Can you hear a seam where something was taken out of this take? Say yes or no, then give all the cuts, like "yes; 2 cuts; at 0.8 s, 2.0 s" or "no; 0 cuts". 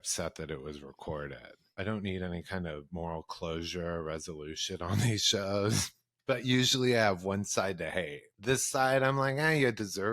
yes; 2 cuts; at 1.7 s, 8.2 s